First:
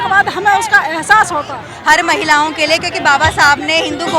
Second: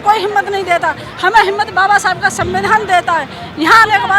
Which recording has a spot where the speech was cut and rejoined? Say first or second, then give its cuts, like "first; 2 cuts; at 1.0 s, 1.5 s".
first; 1 cut; at 1.7 s